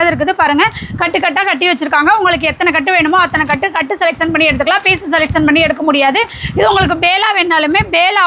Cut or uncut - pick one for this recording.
uncut